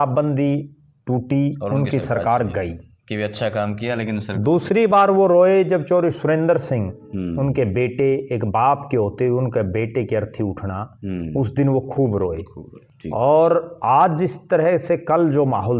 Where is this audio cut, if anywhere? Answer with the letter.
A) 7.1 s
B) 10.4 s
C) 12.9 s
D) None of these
D